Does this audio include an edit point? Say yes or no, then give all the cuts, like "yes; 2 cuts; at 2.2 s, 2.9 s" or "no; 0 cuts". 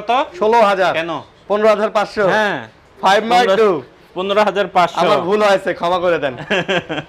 no; 0 cuts